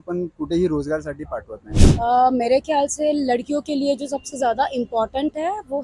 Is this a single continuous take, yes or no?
no